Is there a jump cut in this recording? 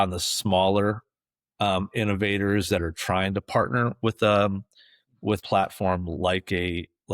yes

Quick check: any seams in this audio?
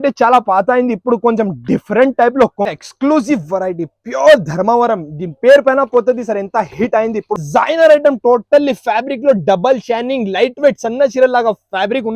yes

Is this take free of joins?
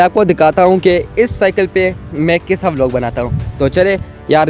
yes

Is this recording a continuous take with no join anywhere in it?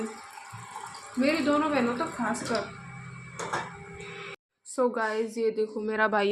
yes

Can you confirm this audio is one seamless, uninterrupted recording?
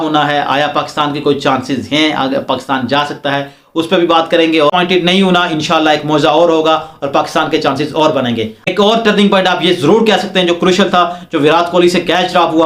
no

